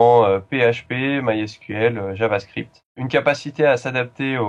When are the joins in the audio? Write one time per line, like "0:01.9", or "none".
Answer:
0:03.0